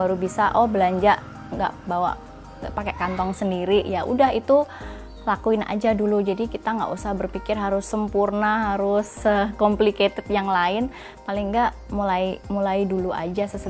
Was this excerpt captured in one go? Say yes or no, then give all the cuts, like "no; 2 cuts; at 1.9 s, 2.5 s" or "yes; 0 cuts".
yes; 0 cuts